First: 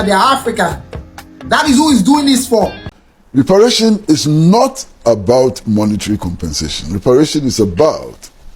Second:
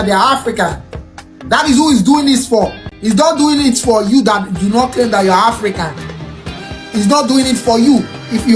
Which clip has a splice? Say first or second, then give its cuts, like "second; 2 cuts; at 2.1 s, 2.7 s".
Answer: first; 1 cut; at 2.9 s